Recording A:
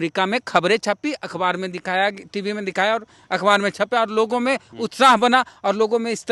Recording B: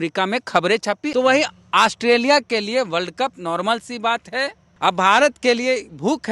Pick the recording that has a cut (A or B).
B